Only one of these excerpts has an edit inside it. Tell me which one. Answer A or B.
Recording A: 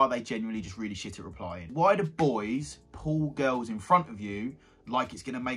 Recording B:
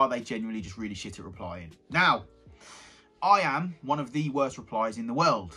A